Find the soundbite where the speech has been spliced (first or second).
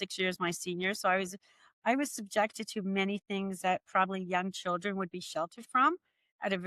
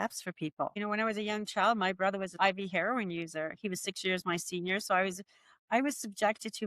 second